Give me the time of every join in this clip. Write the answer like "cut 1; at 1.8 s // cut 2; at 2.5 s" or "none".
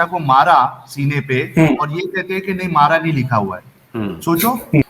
none